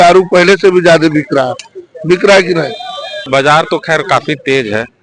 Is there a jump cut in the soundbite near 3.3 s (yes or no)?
yes